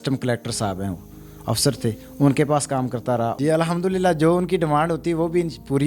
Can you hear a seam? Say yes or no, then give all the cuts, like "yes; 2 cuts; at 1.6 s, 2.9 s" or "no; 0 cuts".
yes; 1 cut; at 3.3 s